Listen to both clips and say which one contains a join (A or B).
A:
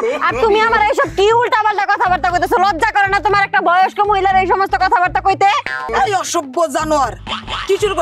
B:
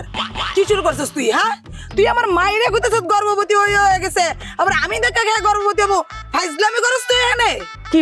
A